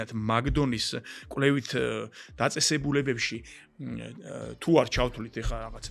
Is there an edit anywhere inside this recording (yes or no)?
no